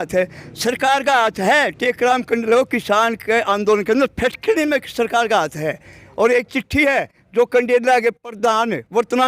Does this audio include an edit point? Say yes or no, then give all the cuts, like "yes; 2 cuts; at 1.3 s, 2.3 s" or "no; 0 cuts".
yes; 1 cut; at 6.0 s